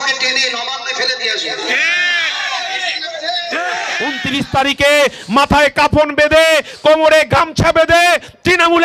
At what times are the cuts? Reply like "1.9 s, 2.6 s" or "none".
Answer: 4.2 s